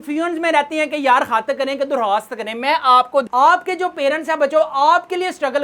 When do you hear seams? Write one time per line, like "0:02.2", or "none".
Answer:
0:03.3